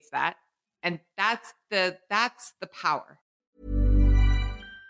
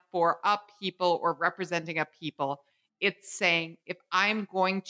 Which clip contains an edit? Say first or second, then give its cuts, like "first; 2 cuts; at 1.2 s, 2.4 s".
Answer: first; 1 cut; at 3.3 s